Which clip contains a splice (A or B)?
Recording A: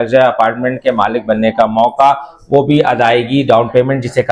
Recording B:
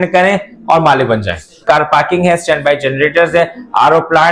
B